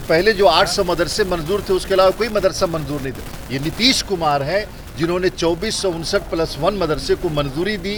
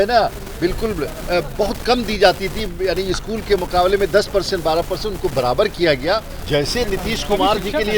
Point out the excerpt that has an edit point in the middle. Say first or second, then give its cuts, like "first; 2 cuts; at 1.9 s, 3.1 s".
second; 1 cut; at 6.4 s